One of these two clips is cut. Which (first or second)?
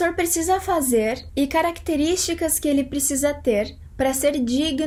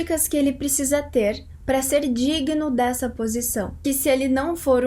second